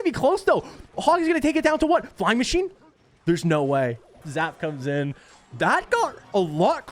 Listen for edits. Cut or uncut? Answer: cut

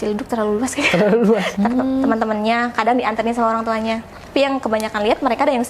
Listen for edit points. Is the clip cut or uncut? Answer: cut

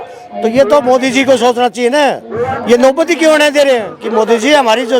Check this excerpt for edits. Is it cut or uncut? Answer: cut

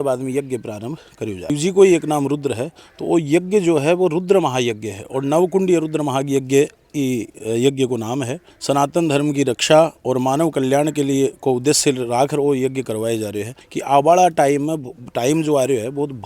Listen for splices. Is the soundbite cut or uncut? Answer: cut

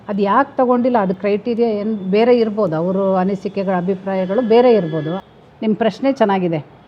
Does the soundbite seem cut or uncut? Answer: cut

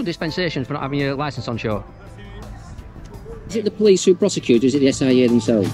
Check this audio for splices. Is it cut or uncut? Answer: cut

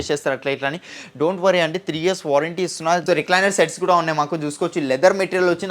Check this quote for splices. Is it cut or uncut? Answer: cut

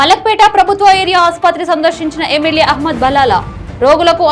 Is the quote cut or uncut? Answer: uncut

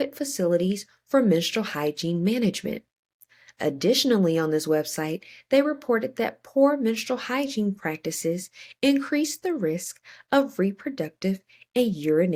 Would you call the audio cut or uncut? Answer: uncut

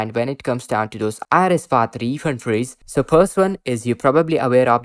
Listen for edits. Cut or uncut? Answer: uncut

